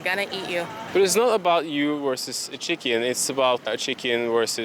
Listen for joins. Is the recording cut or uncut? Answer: cut